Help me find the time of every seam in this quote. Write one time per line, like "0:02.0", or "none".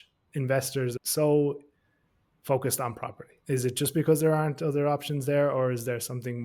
0:01.0